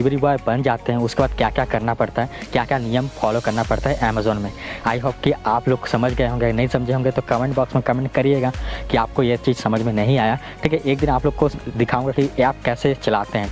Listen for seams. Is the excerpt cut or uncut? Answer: uncut